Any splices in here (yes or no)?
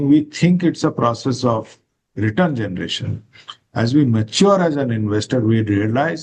no